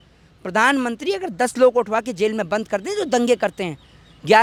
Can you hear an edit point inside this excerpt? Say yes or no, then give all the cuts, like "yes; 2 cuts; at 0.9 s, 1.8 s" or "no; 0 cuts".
no; 0 cuts